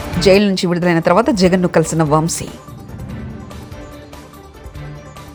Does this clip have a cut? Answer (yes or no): no